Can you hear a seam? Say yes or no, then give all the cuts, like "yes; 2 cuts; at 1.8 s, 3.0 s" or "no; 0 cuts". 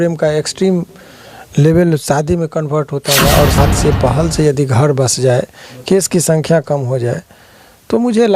yes; 1 cut; at 3.6 s